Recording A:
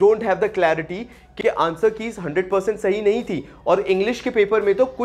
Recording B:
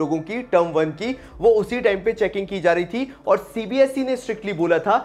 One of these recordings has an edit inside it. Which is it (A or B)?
A